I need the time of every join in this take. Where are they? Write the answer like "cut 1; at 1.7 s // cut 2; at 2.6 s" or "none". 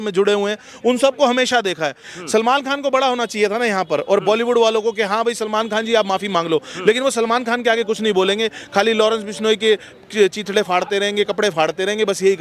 cut 1; at 2.0 s